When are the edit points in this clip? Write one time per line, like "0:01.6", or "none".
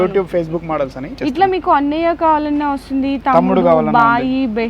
0:01.1